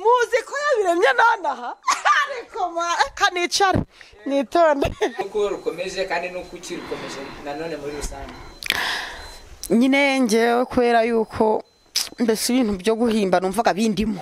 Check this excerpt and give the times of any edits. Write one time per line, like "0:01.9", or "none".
0:05.3